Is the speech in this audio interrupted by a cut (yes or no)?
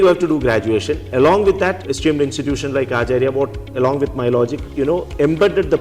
yes